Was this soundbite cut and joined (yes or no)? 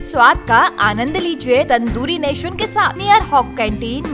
yes